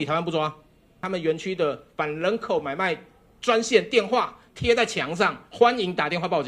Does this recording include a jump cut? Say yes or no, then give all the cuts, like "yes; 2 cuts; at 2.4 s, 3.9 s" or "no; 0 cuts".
yes; 1 cut; at 0.9 s